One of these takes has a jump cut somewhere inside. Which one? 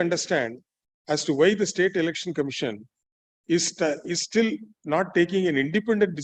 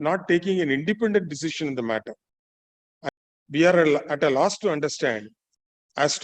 second; 1 cut; at 3.1 s

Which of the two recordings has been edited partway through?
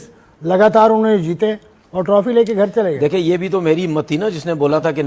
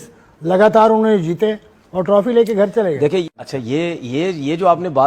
first; 1 cut; at 3.2 s

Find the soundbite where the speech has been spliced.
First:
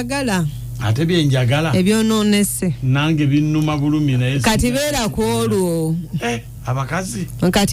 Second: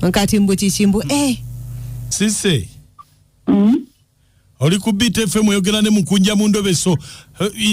second; 1 cut; at 2.1 s

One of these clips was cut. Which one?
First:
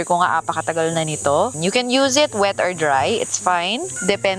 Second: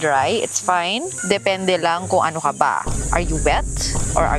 first; 1 cut; at 1.6 s

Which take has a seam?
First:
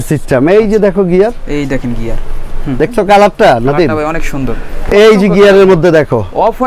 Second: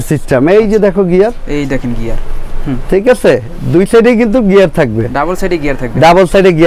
first; 2 cuts; at 2.8 s, 4.9 s

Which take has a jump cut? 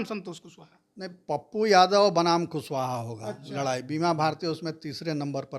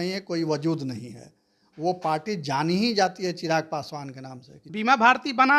second; 1 cut; at 4.6 s

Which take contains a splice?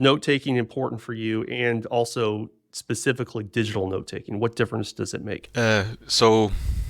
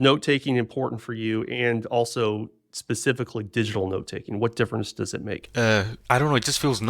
second; 1 cut; at 6.0 s

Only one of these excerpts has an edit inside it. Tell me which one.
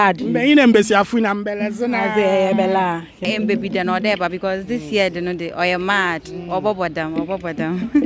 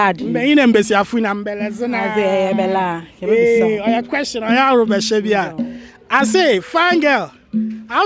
first; 1 cut; at 3.2 s

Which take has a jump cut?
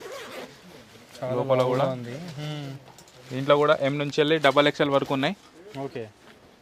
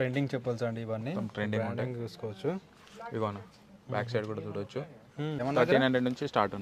second; 1 cut; at 5.4 s

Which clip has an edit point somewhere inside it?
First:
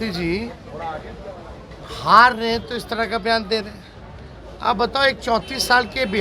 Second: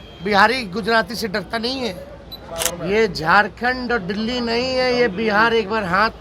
second; 1 cut; at 2.5 s

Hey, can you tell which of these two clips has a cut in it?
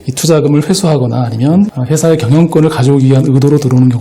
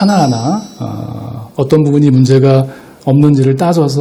first; 1 cut; at 1.7 s

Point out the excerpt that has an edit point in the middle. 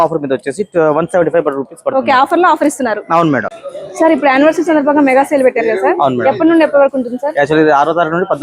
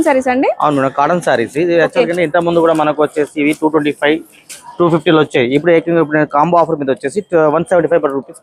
first; 1 cut; at 3.5 s

